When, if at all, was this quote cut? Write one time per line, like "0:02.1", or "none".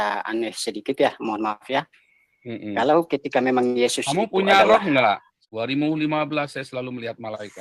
0:05.4